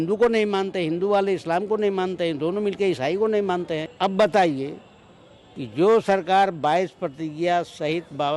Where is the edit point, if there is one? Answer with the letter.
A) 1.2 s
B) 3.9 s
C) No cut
B